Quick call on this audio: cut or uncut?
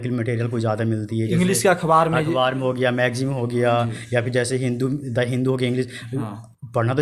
uncut